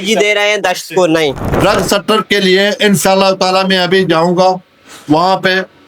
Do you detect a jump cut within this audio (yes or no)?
yes